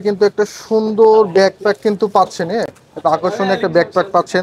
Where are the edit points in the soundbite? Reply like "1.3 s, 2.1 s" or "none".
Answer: none